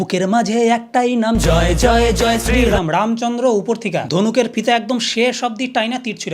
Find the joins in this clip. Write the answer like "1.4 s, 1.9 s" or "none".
none